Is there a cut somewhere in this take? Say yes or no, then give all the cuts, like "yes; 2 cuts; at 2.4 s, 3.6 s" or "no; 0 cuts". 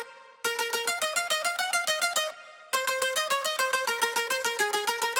no; 0 cuts